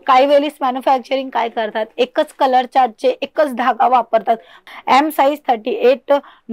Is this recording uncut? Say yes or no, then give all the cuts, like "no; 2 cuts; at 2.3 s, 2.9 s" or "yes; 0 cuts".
no; 1 cut; at 4.6 s